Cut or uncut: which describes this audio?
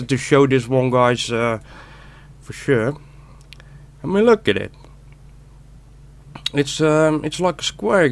uncut